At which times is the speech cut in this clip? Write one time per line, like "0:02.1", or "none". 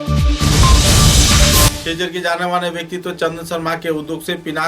0:01.8